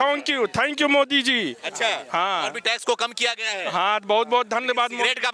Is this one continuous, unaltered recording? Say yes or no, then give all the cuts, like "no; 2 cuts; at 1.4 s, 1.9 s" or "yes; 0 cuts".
yes; 0 cuts